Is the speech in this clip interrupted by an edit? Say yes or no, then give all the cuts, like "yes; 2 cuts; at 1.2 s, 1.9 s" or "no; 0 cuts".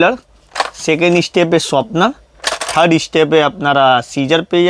no; 0 cuts